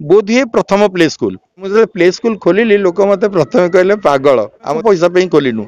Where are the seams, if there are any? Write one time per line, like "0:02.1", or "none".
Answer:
0:01.7
0:04.8